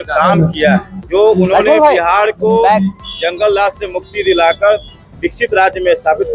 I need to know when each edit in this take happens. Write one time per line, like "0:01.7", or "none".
0:01.0